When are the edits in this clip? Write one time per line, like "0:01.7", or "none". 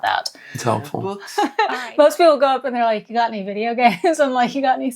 0:01.2